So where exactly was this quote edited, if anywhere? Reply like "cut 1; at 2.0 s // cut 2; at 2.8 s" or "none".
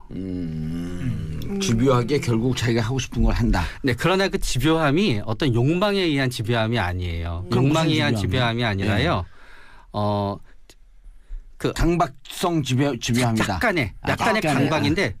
none